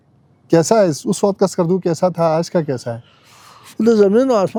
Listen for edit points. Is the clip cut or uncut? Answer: uncut